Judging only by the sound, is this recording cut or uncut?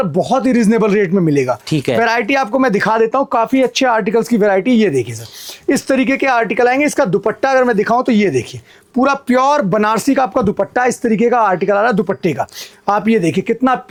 uncut